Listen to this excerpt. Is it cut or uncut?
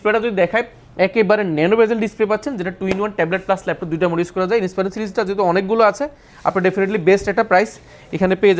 uncut